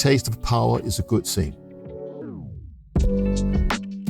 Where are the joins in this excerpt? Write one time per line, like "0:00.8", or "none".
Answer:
0:01.7